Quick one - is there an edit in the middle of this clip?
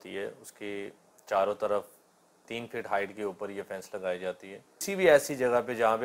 yes; 1 cut; at 4.8 s

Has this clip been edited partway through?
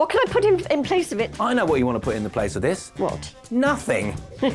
no; 0 cuts

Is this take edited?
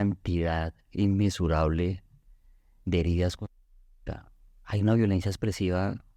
no; 0 cuts

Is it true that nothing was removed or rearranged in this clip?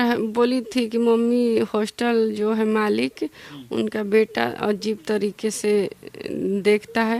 yes; 0 cuts

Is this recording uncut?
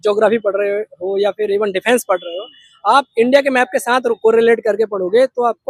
yes; 0 cuts

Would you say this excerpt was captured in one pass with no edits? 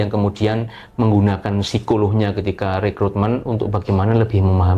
yes; 0 cuts

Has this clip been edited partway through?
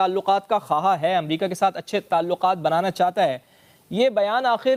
no; 0 cuts

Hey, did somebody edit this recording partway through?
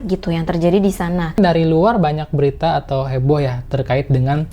yes; 1 cut; at 1.4 s

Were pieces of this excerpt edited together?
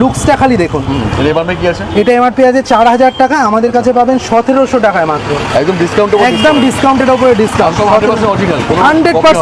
no; 0 cuts

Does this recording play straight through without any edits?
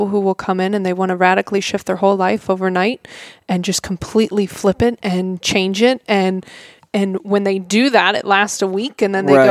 yes; 0 cuts

